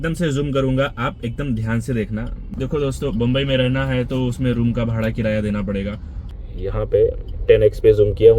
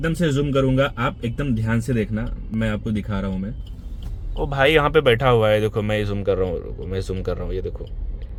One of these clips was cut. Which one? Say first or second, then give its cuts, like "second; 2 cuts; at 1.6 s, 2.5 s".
first; 2 cuts; at 2.5 s, 6.1 s